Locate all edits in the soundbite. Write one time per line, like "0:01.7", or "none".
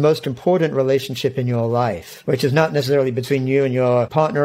0:02.1